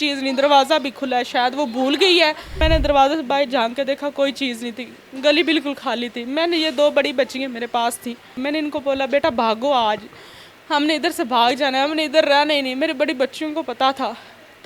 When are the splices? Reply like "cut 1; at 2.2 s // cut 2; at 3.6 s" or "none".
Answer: cut 1; at 2.6 s // cut 2; at 8.4 s